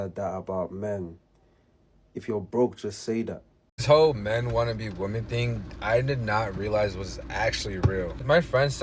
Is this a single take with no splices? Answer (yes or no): no